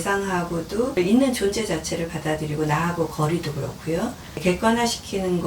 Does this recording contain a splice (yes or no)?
yes